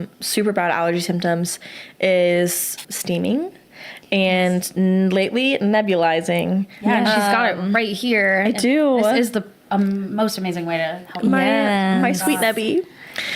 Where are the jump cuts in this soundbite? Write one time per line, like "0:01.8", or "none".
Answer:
0:02.9